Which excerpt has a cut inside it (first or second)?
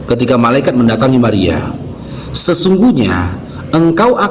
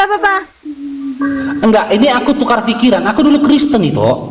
second